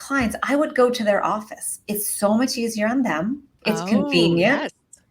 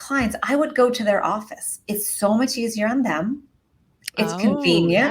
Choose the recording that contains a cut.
first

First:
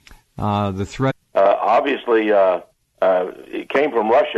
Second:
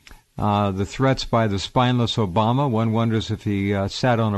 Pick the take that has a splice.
second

